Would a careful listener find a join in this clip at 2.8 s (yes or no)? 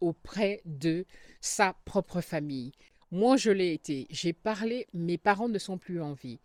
no